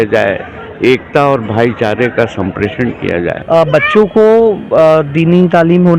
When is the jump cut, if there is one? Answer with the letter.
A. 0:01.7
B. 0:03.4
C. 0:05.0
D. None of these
B